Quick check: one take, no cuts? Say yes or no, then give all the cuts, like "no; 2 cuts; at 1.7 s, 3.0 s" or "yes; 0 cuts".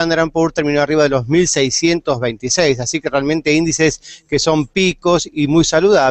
no; 1 cut; at 3.3 s